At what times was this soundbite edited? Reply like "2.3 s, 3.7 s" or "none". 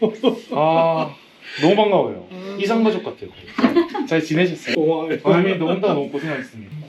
4.6 s